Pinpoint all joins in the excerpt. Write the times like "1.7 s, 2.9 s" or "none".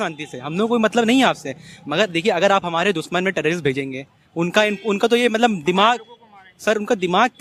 none

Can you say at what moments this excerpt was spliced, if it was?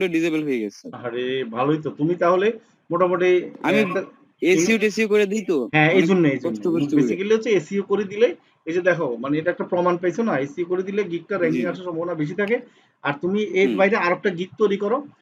none

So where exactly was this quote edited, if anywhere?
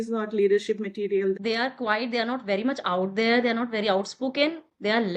1.4 s

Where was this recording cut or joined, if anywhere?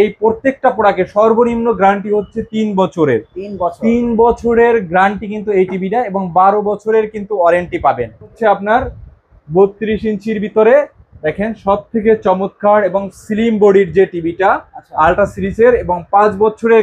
8.3 s

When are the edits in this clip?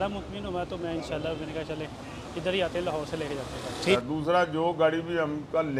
4.0 s

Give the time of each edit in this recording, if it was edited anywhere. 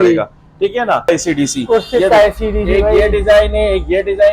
1.1 s

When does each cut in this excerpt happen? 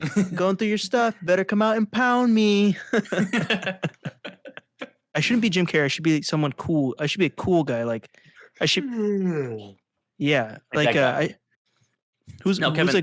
5.1 s

